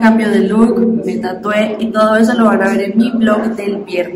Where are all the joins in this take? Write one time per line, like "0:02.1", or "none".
none

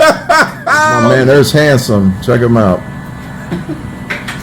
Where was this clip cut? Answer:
0:01.0

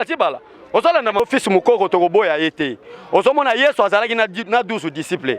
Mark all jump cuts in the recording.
0:01.2

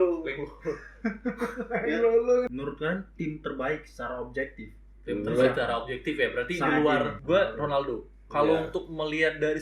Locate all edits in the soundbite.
0:02.5
0:07.2

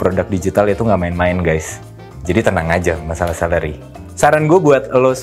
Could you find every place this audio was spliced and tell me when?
none

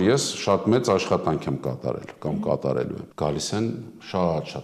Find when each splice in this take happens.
0:03.0

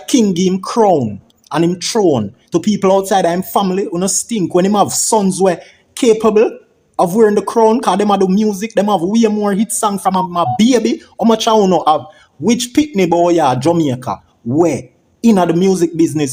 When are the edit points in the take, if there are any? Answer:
none

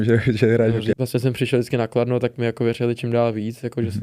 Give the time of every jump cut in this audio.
0:01.0

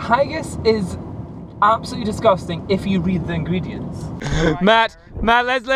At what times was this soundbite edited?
0:04.2

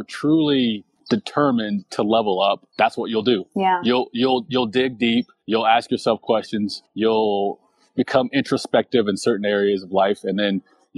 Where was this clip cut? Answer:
0:00.9
0:02.7
0:05.4
0:06.8

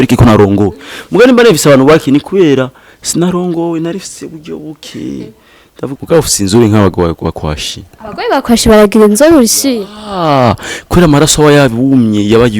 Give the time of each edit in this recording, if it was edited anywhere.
0:06.0

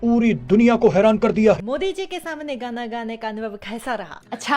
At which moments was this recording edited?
0:01.7

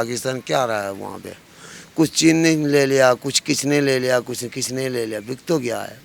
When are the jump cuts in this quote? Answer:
none

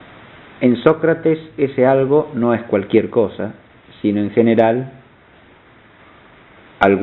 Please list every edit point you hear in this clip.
0:01.2

